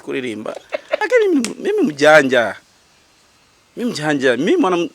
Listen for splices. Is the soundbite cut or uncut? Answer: cut